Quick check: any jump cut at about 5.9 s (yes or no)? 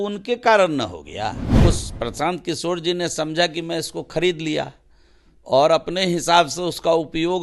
no